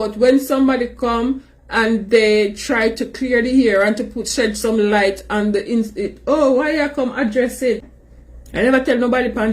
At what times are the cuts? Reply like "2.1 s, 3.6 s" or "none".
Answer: 8.0 s